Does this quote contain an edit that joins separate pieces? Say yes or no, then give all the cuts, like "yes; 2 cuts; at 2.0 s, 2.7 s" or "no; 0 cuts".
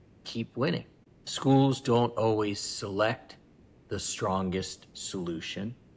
yes; 1 cut; at 1.0 s